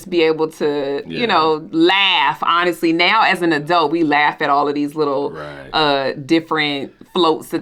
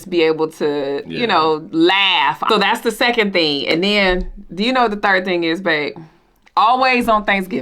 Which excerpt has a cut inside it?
second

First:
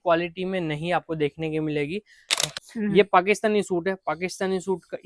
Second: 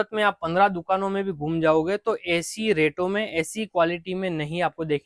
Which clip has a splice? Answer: first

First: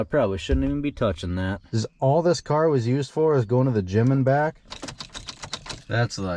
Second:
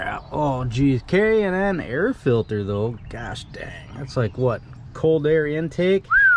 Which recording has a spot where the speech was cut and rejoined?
first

